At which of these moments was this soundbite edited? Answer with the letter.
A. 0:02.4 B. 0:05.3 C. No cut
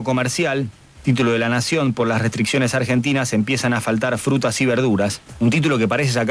C